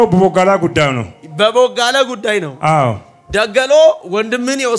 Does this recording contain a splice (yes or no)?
no